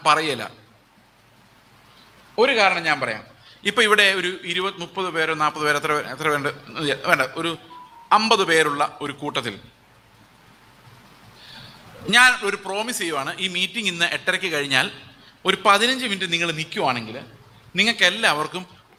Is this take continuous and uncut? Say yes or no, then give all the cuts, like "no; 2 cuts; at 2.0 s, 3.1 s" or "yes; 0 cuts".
yes; 0 cuts